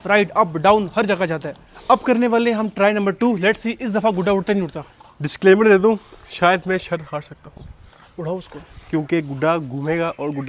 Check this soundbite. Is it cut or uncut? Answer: uncut